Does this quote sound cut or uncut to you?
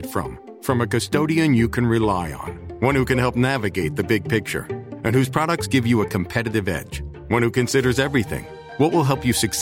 uncut